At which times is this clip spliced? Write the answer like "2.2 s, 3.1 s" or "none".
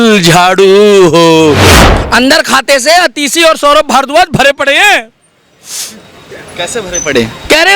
1.8 s